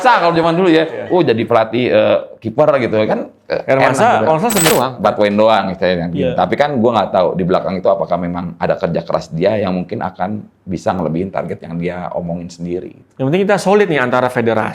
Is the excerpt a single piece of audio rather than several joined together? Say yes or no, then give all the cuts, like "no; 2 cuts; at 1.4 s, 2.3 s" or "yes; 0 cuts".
no; 1 cut; at 4.7 s